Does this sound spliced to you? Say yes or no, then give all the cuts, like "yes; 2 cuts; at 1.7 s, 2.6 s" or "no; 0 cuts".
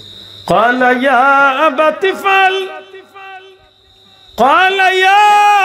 no; 0 cuts